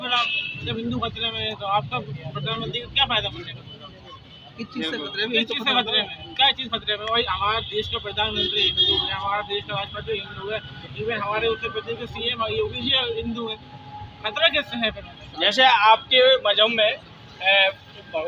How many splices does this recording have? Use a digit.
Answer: 0